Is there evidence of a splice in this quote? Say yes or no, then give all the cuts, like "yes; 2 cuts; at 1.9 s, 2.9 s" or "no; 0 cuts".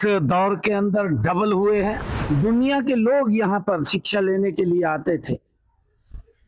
yes; 1 cut; at 2.1 s